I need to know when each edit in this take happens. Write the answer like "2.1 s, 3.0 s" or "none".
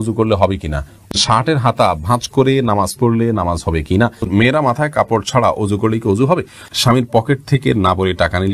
1.1 s, 4.3 s, 6.7 s